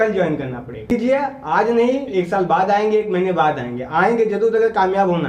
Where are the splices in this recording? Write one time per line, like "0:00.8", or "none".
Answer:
0:00.9